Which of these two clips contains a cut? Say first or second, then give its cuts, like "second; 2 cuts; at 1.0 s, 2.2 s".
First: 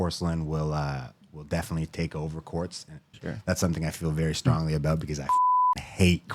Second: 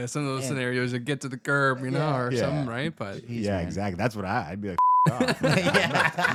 first; 1 cut; at 3.1 s